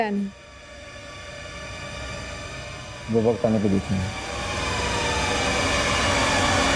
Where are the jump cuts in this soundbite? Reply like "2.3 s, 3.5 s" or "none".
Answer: none